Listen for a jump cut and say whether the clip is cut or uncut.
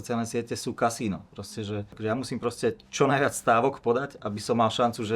cut